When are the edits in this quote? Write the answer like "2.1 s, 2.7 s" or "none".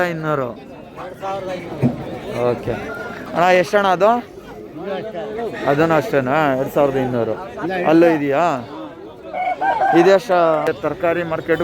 10.7 s